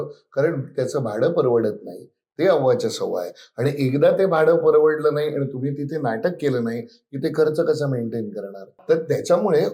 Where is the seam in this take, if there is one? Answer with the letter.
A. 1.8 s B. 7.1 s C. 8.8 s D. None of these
C